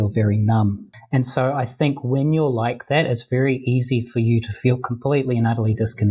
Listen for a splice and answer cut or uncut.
cut